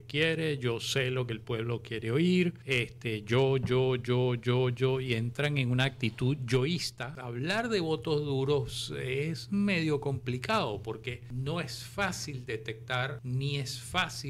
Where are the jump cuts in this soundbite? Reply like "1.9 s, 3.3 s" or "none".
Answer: 2.6 s, 7.2 s, 11.2 s, 13.2 s